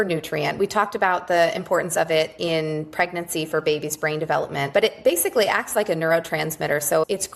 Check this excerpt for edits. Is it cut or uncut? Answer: cut